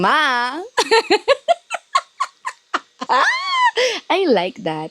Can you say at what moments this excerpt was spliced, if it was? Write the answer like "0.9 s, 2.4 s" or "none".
3.0 s